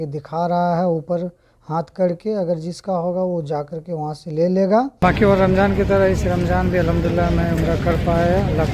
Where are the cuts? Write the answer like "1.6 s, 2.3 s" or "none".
4.9 s